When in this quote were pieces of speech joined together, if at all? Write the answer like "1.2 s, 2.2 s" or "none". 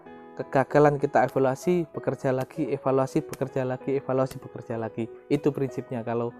none